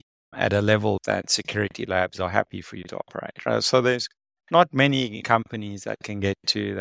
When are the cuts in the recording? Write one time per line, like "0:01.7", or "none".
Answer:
0:01.0
0:05.2